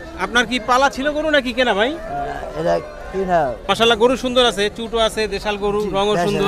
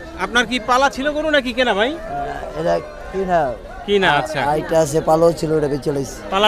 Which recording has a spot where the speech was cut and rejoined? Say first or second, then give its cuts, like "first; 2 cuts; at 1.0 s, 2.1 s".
first; 1 cut; at 3.6 s